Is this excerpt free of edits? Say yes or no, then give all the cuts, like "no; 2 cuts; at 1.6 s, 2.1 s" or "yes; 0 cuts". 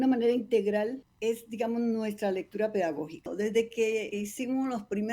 no; 3 cuts; at 1.1 s, 3.3 s, 4.1 s